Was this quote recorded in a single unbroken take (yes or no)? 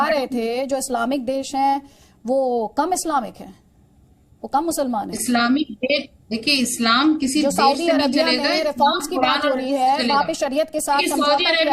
yes